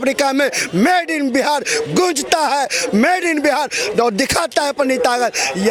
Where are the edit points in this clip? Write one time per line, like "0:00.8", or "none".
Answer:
none